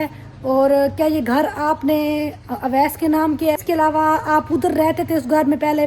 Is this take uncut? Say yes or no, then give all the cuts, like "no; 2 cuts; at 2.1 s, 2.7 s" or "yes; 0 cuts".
no; 1 cut; at 3.6 s